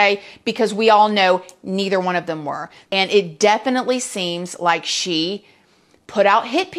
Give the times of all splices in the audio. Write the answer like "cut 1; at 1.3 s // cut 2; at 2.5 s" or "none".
cut 1; at 2.7 s